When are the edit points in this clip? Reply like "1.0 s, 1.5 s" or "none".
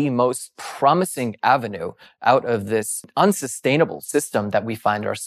3.1 s